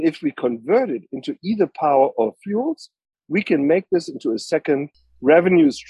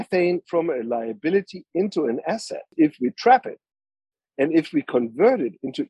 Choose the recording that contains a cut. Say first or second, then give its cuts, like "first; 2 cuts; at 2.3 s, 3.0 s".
second; 1 cut; at 2.7 s